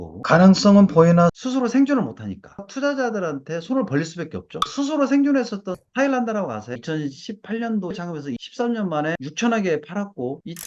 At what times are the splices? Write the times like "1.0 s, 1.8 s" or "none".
none